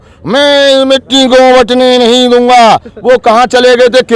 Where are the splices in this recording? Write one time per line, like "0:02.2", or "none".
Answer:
none